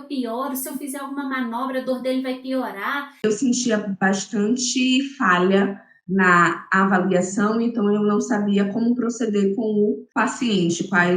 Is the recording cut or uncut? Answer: cut